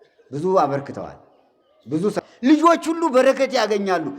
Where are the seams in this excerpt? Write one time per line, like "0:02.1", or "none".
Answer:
0:02.2